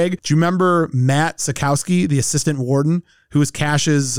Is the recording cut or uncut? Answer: uncut